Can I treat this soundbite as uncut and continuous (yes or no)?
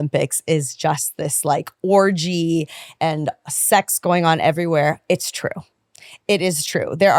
yes